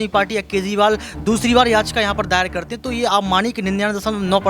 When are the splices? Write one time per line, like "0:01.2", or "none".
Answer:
0:01.4